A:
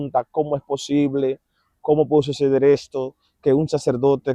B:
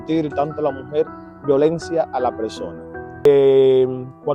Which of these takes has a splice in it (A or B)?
B